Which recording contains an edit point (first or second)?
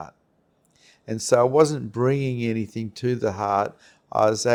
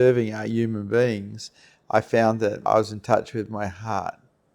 second